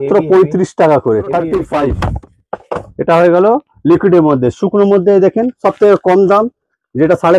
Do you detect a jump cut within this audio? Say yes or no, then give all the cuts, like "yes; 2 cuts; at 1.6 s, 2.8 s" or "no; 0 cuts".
yes; 1 cut; at 1.7 s